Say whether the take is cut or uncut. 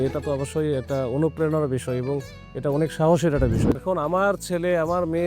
cut